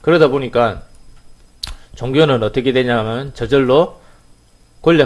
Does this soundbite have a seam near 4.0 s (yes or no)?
yes